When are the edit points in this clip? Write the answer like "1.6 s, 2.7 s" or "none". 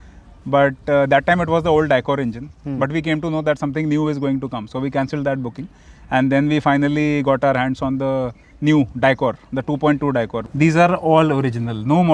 10.4 s